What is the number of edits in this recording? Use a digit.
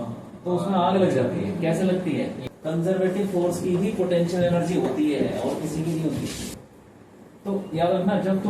2